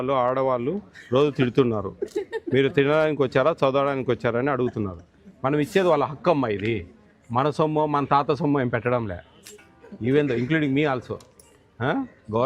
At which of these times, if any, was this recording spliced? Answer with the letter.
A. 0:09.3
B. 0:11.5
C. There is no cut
C